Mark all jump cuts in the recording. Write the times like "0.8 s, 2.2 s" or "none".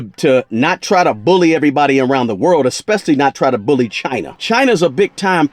4.4 s